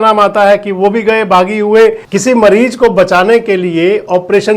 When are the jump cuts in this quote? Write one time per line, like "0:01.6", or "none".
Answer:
0:02.0